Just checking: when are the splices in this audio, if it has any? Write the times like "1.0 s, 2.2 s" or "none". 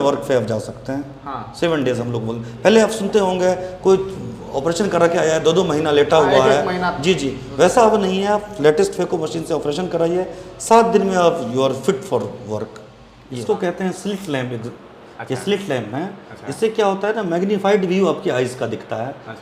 13.3 s